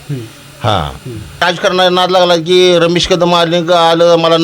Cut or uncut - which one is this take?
cut